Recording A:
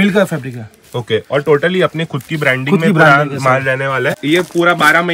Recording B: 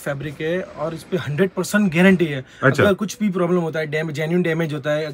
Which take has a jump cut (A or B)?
A